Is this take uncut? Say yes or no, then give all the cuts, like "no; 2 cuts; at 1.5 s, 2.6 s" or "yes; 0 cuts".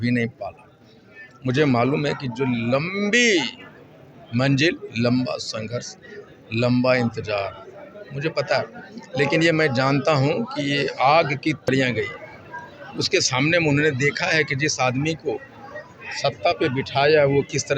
no; 1 cut; at 11.7 s